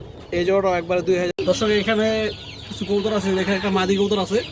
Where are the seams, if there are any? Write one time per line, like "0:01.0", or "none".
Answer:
0:01.3